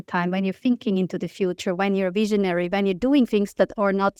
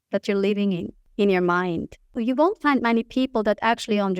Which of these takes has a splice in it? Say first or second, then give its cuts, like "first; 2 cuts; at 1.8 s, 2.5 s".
second; 2 cuts; at 1.0 s, 2.2 s